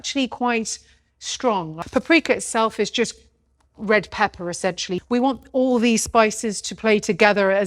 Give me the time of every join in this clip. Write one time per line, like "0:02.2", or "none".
0:01.8
0:04.9